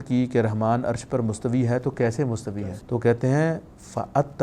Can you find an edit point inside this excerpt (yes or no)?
yes